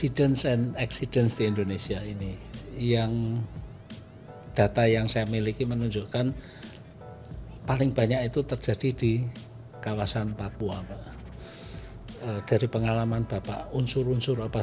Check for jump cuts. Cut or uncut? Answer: uncut